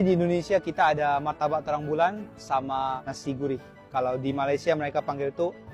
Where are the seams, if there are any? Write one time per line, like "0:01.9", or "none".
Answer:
none

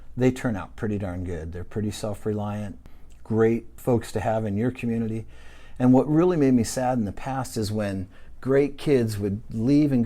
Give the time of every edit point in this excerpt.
0:03.7

